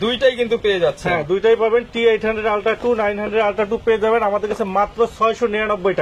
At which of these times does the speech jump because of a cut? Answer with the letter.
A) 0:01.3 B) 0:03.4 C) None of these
C